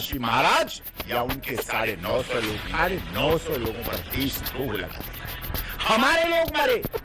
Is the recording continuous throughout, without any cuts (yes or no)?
no